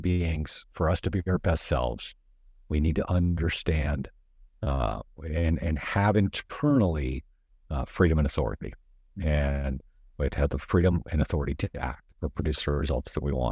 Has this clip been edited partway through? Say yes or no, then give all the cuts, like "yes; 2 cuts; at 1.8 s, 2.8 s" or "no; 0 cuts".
no; 0 cuts